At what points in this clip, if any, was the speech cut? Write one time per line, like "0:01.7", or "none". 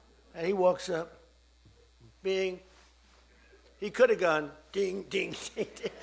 none